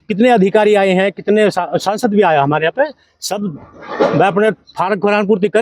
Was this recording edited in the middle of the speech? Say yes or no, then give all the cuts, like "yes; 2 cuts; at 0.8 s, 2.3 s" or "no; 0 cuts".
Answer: no; 0 cuts